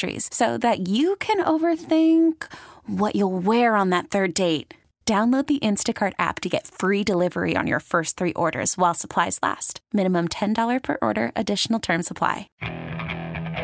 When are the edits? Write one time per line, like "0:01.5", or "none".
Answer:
0:12.5